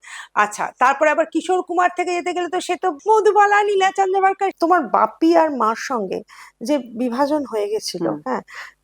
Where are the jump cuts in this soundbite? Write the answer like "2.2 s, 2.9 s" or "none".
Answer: 4.5 s

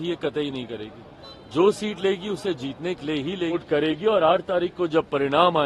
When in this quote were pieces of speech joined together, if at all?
3.6 s

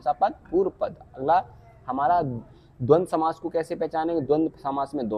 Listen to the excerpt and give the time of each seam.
none

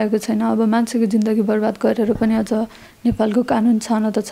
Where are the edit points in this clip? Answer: none

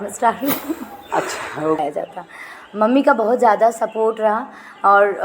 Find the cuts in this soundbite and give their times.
1.8 s

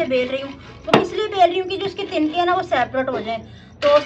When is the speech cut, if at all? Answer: none

